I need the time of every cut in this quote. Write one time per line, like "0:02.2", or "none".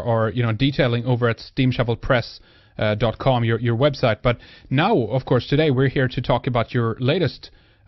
none